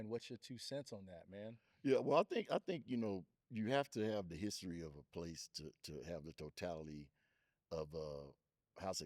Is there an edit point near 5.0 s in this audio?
no; 1 cut; at 3.4 s

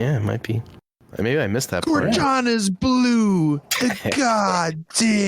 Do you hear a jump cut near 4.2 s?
no; 1 cut; at 1.0 s

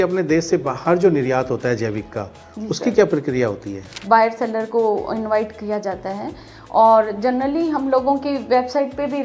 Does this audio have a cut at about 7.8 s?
no; 1 cut; at 3.9 s

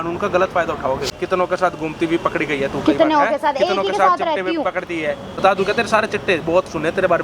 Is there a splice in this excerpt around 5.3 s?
yes; 2 cuts; at 1.1 s, 5.3 s

